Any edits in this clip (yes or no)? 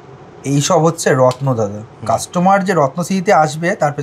no